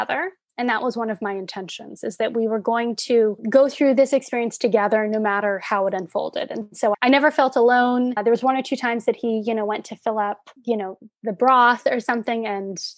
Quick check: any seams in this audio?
no; 0 cuts

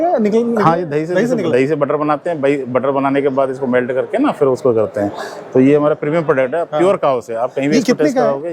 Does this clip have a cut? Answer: no; 0 cuts

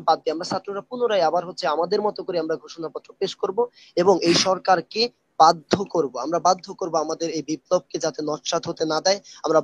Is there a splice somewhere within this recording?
no; 0 cuts

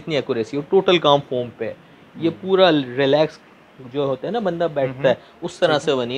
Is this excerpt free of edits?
yes; 0 cuts

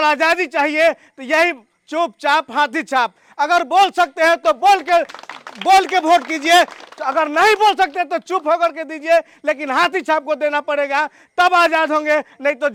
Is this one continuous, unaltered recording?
yes; 0 cuts

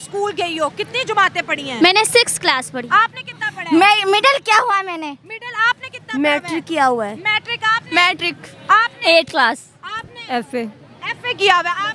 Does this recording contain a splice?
no; 0 cuts

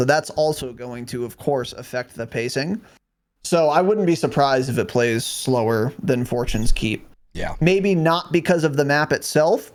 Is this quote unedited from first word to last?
yes; 0 cuts

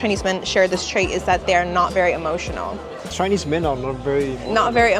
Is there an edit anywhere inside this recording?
no; 0 cuts

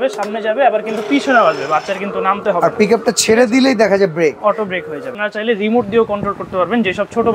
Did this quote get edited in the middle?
yes; 1 cut; at 5.2 s

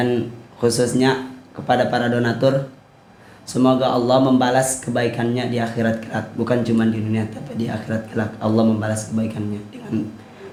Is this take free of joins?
yes; 0 cuts

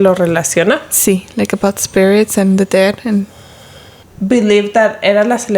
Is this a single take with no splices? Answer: no; 1 cut; at 4.1 s

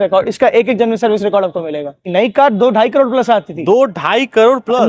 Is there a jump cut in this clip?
yes; 1 cut; at 2.1 s

